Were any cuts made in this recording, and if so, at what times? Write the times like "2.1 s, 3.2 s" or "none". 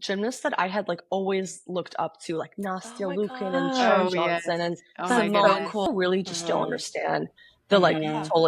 5.9 s